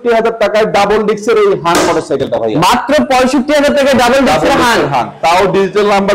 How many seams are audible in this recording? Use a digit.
0